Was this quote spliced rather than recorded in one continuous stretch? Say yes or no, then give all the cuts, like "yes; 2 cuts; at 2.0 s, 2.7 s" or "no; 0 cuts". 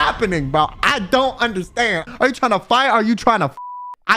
yes; 1 cut; at 2.0 s